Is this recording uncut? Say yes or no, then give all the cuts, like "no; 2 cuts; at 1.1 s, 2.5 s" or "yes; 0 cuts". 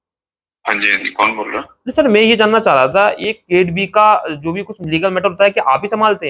yes; 0 cuts